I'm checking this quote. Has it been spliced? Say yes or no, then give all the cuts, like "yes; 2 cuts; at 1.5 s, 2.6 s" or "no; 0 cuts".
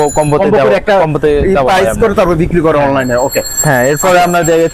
no; 0 cuts